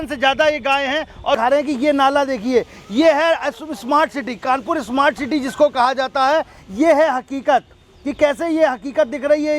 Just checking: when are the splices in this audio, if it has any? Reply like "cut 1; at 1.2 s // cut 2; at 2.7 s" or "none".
cut 1; at 1.4 s